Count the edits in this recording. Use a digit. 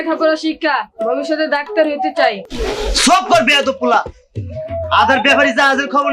1